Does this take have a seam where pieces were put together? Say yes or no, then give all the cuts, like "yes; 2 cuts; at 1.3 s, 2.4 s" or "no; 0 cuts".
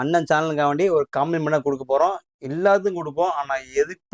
no; 0 cuts